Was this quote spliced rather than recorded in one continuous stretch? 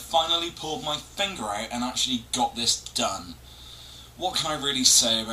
yes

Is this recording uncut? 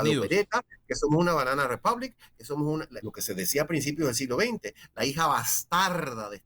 no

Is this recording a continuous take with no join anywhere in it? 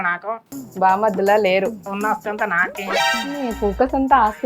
no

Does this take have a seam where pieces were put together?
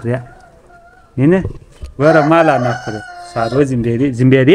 no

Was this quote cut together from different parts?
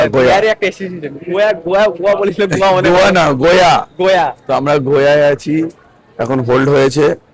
no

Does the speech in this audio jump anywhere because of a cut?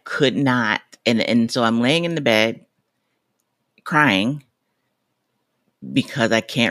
no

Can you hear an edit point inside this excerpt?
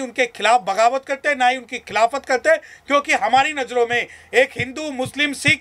no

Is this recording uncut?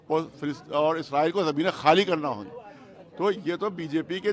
yes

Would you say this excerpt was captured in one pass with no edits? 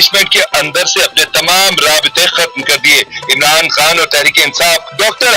yes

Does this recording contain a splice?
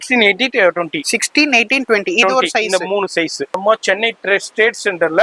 yes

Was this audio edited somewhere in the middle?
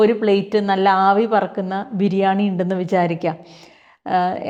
no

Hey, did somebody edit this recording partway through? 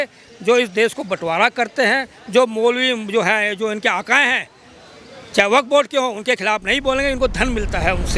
no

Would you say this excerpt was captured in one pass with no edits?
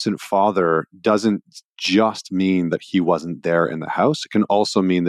yes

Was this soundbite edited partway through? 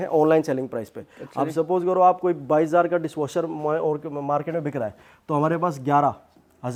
no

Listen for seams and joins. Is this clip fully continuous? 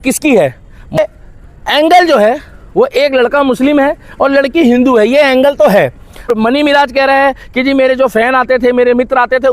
no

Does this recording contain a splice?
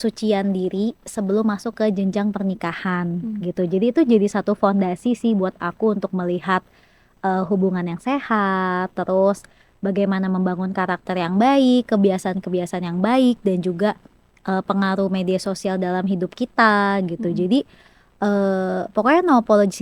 no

